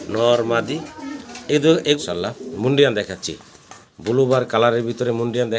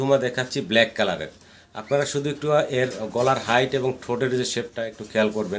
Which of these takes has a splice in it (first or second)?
first